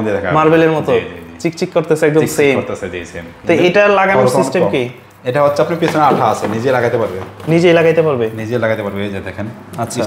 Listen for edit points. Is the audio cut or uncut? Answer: uncut